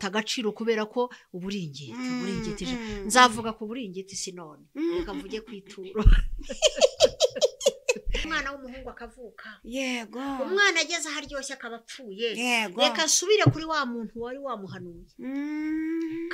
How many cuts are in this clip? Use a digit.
1